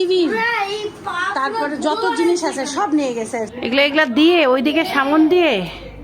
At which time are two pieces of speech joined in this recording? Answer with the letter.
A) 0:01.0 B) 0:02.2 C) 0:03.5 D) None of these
C